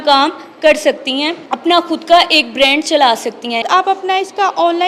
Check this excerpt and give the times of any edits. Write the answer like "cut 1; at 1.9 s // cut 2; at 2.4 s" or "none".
cut 1; at 1.4 s // cut 2; at 3.6 s